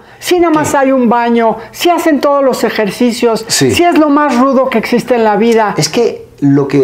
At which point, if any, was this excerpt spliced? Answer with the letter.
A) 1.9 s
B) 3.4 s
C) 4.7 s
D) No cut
D